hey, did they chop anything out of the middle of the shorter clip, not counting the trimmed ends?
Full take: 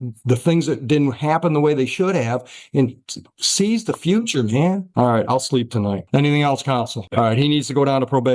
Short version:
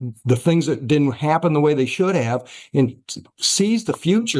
no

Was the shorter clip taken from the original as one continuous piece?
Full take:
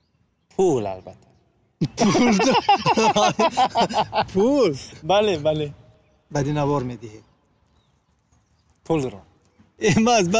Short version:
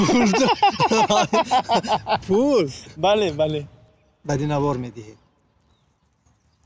yes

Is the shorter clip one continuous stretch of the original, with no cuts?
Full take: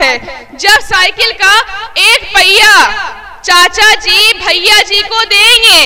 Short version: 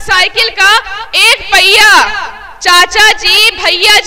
yes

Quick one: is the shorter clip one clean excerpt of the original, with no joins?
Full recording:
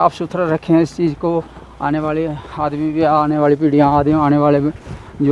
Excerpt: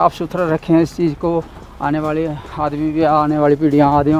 yes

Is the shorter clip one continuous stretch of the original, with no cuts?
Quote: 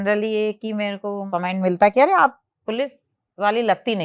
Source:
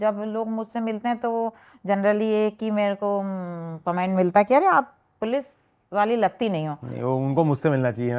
no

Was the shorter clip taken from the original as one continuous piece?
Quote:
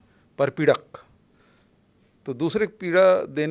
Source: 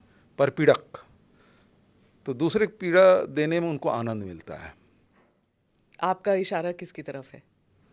yes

